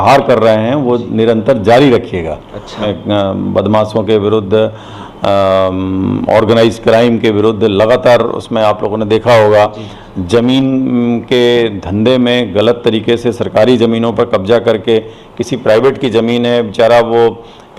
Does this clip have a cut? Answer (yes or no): yes